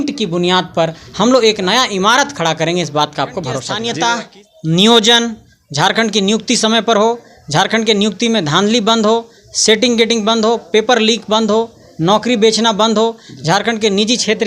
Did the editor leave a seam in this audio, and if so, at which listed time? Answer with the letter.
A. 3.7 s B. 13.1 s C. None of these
A